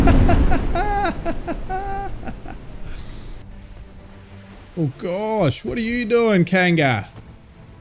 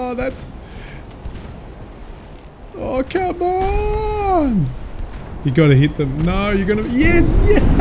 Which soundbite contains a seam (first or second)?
first